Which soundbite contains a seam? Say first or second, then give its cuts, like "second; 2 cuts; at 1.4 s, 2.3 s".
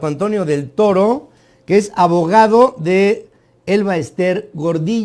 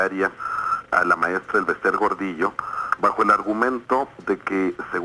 second; 1 cut; at 3.8 s